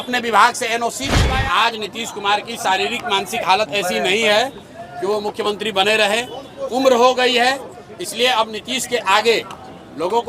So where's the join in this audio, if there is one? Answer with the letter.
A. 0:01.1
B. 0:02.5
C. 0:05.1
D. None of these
A